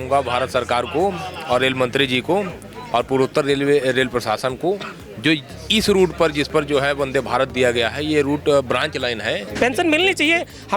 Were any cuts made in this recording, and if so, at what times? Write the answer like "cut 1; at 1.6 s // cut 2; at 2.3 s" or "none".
cut 1; at 9.5 s